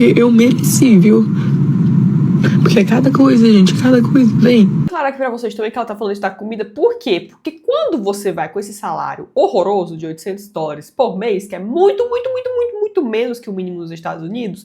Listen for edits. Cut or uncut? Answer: cut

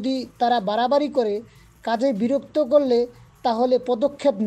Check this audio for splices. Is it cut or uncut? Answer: uncut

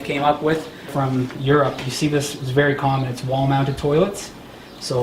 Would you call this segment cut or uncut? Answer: cut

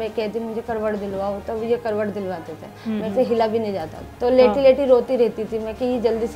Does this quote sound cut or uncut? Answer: cut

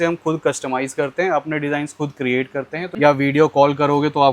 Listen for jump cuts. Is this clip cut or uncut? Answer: cut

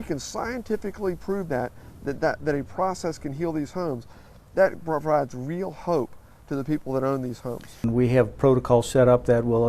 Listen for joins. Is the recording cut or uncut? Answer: cut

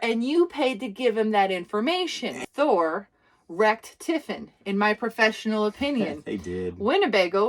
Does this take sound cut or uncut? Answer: cut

